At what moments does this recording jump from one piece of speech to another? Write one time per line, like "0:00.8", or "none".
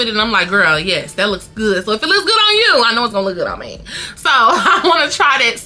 none